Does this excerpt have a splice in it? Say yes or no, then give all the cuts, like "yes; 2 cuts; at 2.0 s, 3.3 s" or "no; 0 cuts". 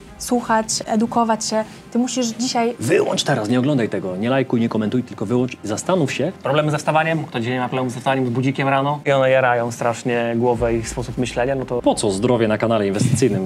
yes; 5 cuts; at 0.8 s, 2.8 s, 6.4 s, 9.0 s, 11.8 s